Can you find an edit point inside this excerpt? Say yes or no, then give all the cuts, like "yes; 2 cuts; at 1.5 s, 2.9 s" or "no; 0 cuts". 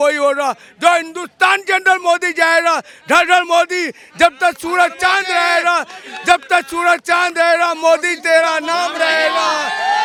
no; 0 cuts